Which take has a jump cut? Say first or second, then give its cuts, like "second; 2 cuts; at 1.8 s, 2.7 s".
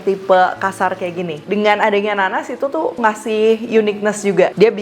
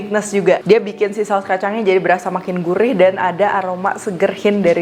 first; 2 cuts; at 1.4 s, 3.0 s